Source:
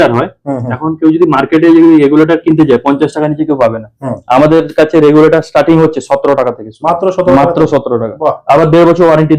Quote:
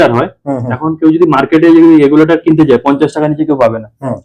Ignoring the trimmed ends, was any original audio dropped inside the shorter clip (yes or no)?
no